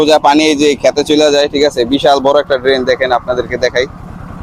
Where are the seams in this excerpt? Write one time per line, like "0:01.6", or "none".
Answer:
none